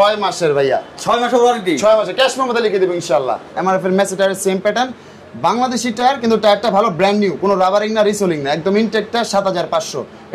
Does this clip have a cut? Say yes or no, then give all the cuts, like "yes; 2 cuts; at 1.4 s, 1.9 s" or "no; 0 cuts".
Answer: yes; 1 cut; at 3.5 s